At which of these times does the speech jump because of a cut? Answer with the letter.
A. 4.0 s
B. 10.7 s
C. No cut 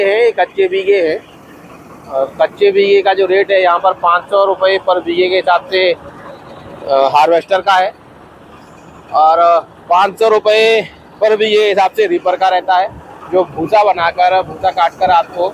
C